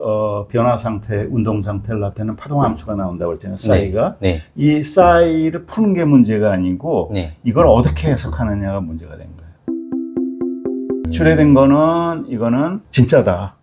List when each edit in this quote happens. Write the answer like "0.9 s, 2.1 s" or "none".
none